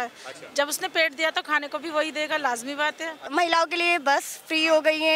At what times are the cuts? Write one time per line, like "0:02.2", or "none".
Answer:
0:03.3